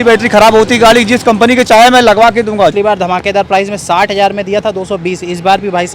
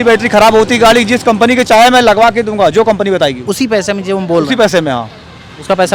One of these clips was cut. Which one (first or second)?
first